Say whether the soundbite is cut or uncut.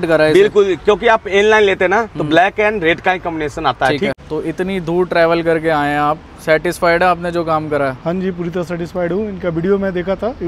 cut